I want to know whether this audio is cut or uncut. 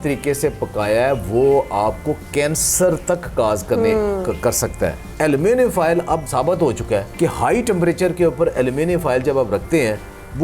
cut